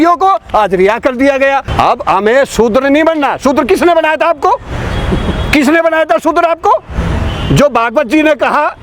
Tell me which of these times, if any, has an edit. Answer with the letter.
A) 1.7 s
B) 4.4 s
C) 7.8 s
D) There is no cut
A